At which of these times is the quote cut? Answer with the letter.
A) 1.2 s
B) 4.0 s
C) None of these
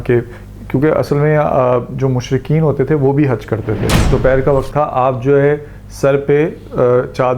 B